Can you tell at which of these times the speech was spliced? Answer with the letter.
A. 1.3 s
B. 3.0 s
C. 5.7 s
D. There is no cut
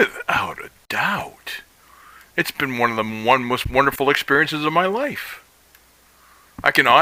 D